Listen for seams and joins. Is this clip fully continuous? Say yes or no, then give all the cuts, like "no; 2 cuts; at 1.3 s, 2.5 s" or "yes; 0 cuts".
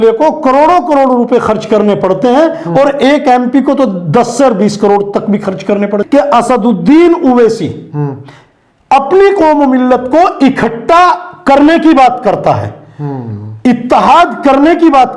no; 1 cut; at 6.0 s